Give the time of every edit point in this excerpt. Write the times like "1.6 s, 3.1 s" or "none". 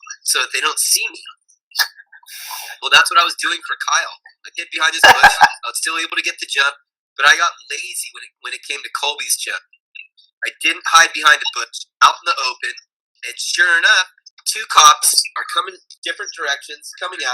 14.2 s, 15.9 s

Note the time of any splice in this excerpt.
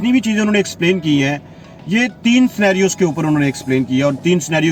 none

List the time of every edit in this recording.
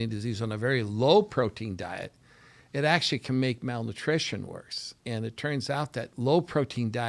4.9 s, 6.1 s

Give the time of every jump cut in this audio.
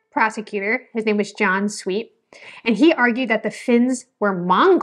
none

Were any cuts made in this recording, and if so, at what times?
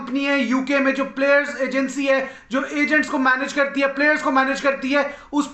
none

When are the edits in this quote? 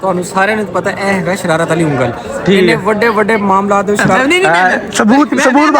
4.1 s

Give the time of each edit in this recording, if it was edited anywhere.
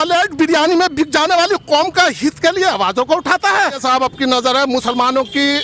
3.8 s

